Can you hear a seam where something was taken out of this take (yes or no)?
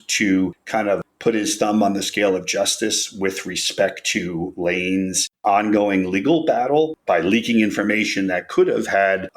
no